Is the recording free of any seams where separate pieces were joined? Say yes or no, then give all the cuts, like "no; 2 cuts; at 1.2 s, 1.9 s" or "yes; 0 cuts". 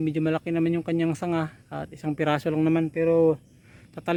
yes; 0 cuts